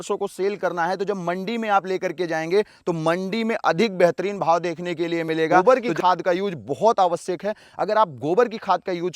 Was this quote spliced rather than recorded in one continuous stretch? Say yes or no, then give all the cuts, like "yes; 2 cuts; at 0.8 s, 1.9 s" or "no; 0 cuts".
yes; 1 cut; at 5.6 s